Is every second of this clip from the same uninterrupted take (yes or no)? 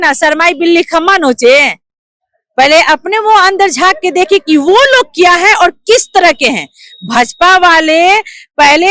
yes